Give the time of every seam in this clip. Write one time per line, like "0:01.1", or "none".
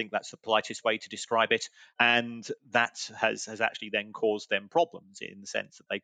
0:01.8

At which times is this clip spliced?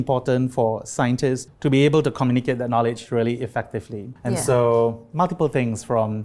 0:01.5
0:04.1

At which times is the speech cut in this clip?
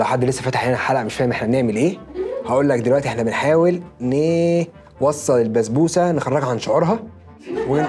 none

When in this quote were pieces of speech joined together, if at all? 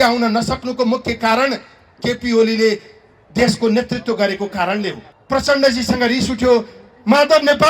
0:05.1

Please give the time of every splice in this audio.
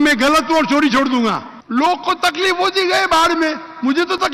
0:01.5

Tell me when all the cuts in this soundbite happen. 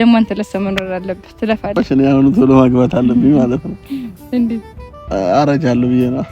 0:01.8

